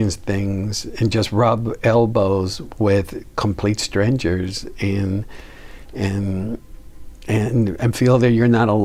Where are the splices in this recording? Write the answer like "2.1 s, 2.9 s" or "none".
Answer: none